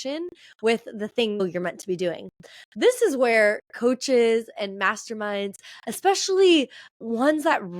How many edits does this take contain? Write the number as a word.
one